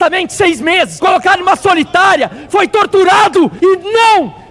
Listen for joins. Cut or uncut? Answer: cut